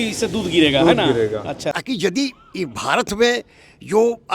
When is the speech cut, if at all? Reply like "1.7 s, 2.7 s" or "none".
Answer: 1.7 s